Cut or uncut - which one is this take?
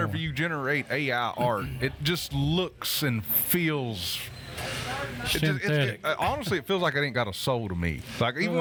uncut